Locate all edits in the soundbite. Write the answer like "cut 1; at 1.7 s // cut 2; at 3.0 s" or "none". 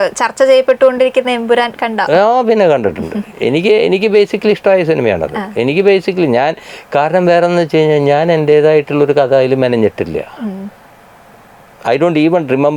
none